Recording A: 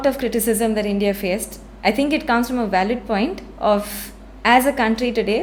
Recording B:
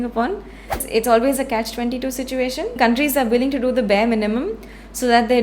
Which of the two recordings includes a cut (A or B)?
B